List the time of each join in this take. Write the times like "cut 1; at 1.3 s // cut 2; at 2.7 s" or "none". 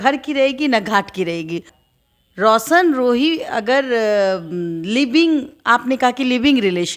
cut 1; at 1.8 s